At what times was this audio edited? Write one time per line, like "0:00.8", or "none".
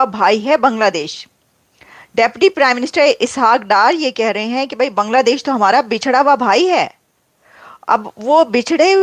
none